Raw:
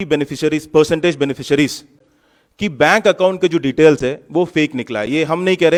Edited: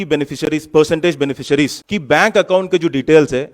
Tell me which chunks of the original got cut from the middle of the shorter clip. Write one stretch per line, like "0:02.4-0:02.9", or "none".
0:01.9-0:02.6